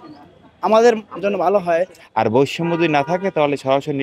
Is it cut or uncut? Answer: cut